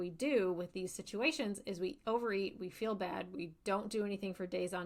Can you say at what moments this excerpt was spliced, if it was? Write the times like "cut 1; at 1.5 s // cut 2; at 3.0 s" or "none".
none